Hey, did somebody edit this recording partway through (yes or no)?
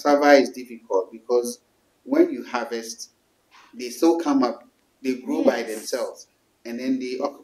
no